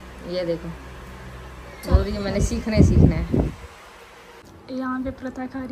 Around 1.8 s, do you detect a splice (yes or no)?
no